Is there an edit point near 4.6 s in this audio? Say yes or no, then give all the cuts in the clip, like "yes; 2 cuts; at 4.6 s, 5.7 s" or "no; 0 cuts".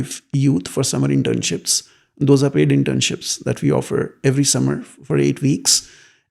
no; 0 cuts